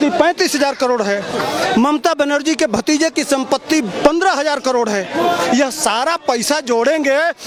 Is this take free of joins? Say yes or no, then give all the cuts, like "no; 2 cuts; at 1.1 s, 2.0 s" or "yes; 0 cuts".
yes; 0 cuts